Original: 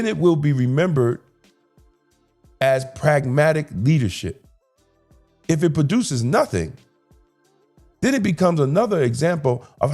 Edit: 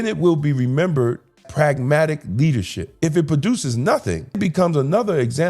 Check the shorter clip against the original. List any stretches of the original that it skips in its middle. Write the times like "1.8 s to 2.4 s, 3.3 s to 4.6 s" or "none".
1.4 s to 2.9 s, 4.3 s to 5.3 s, 6.8 s to 8.2 s